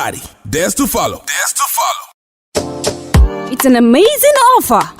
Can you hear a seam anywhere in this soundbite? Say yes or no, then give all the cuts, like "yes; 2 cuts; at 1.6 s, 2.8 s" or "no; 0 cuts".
yes; 1 cut; at 2.0 s